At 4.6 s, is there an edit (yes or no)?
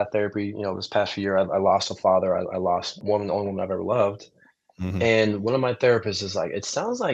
no